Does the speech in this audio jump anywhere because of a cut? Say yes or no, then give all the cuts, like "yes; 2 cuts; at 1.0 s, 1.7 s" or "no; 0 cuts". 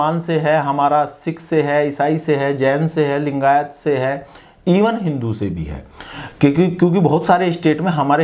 no; 0 cuts